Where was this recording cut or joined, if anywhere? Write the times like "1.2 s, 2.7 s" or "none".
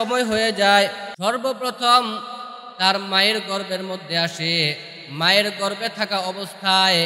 1.1 s